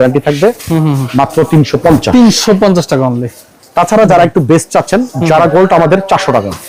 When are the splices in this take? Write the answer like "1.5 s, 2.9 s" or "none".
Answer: none